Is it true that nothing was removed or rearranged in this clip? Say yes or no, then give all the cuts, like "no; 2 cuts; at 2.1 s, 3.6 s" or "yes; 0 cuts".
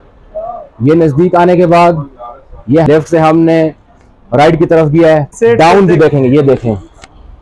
no; 2 cuts; at 2.9 s, 5.3 s